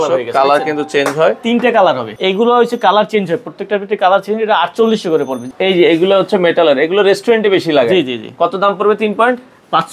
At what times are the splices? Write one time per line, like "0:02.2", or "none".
0:02.1
0:05.5